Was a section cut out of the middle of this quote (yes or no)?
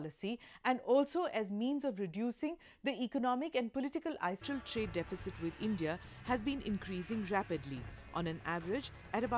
no